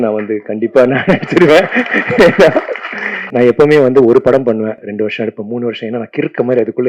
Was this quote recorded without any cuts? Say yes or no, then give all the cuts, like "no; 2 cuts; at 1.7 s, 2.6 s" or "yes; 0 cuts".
no; 2 cuts; at 3.3 s, 4.8 s